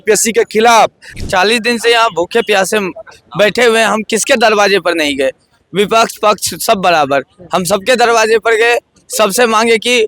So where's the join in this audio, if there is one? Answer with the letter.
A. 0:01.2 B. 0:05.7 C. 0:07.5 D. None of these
A